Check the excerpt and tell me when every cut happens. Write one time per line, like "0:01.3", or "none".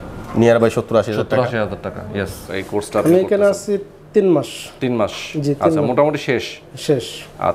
0:02.4

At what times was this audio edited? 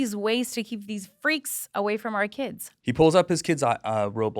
0:02.7

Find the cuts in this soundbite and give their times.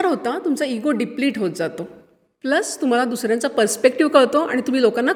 none

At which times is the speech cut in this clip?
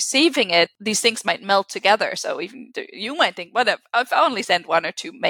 none

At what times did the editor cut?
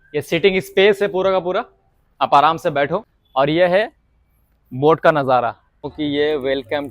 0:03.2
0:05.8

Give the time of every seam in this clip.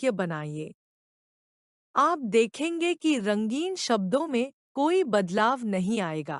0:05.3

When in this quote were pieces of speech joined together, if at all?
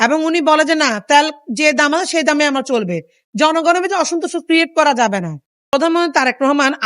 0:05.7

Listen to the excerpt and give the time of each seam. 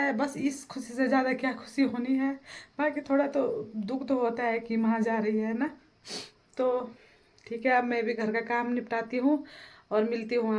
none

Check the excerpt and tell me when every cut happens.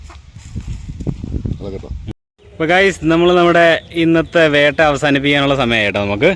0:02.4

